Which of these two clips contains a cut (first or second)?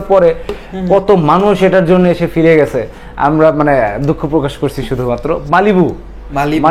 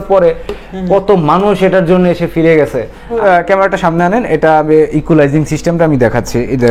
second